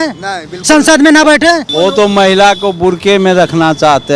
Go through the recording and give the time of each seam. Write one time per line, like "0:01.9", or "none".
0:01.7

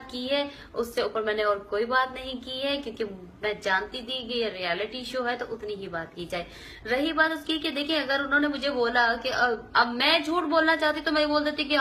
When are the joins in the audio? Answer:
none

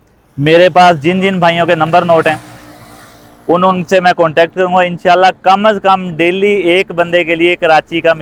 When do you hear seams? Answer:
none

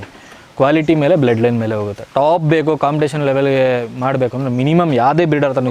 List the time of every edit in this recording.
none

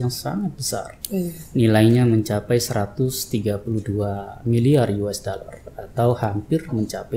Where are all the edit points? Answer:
none

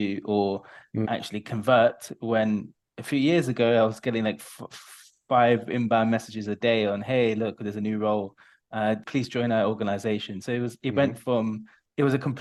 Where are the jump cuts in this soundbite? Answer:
none

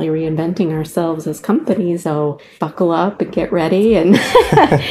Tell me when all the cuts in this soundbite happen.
0:02.1

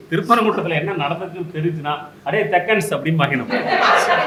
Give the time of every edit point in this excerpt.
none

